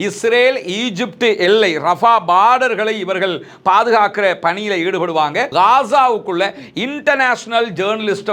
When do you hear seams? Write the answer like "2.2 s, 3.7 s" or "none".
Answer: 5.5 s